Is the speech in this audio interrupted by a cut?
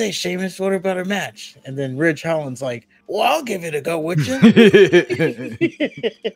yes; 1 cut; at 2.9 s

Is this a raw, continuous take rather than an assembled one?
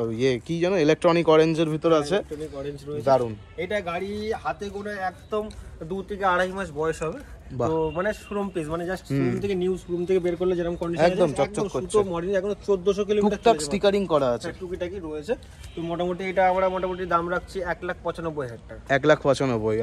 yes; 0 cuts

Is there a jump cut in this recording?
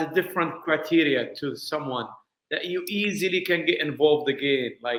no; 0 cuts

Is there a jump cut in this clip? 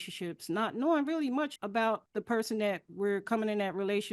yes; 1 cut; at 1.8 s

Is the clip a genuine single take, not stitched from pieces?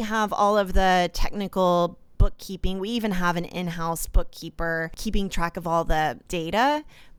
no; 2 cuts; at 4.9 s, 6.2 s

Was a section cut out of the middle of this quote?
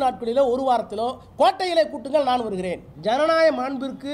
yes; 1 cut; at 2.9 s

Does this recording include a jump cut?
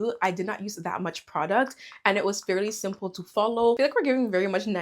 yes; 1 cut; at 3.8 s

